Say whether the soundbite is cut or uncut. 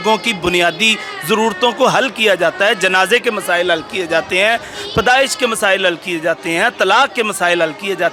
uncut